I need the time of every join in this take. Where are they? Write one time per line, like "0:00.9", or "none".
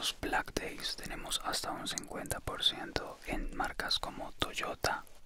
none